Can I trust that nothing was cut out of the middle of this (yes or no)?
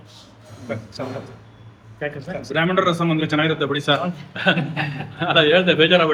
yes